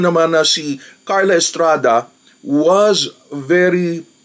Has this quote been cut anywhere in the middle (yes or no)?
no